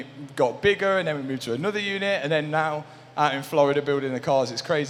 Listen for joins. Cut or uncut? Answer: uncut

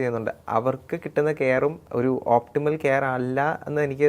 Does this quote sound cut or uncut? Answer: cut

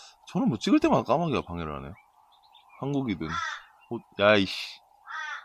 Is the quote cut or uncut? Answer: uncut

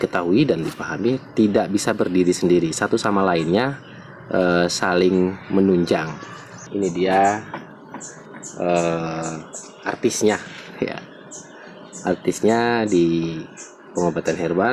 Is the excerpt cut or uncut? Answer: cut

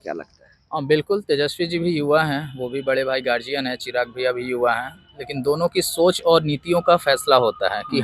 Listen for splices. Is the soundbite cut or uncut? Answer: uncut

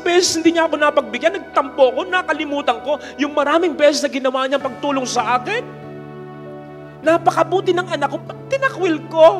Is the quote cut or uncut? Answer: uncut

